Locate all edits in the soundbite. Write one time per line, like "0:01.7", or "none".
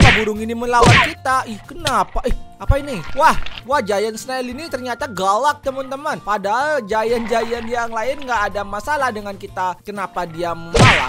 none